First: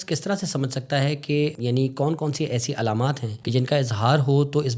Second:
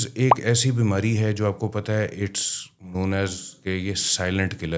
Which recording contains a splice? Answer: first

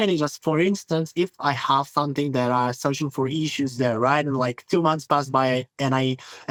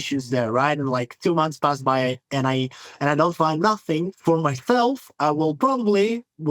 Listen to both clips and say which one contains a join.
second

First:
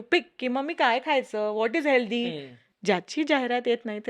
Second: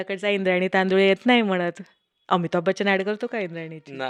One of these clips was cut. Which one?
first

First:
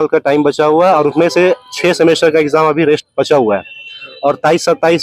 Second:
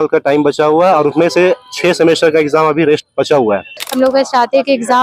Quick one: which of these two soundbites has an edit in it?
second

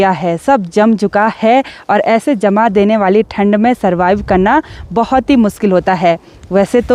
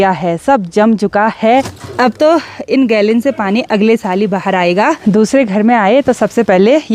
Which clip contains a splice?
second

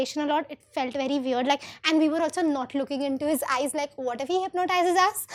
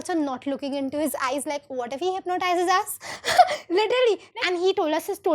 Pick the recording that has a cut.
second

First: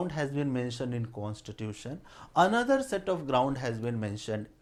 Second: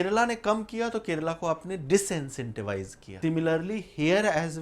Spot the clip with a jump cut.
second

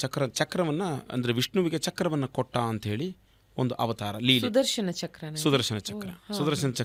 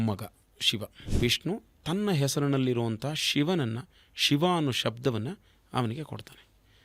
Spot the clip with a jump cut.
second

